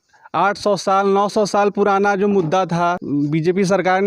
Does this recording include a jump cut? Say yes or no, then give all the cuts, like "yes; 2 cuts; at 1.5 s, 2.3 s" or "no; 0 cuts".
yes; 1 cut; at 3.0 s